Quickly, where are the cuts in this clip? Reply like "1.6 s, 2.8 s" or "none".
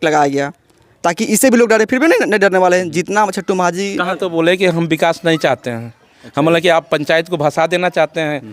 4.2 s